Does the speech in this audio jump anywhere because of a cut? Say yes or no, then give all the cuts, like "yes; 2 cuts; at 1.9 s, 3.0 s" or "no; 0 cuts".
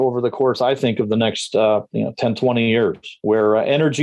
yes; 1 cut; at 3.1 s